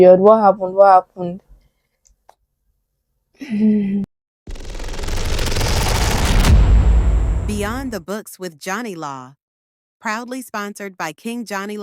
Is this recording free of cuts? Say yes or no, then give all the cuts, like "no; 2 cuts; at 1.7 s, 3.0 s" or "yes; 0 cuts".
no; 1 cut; at 4.1 s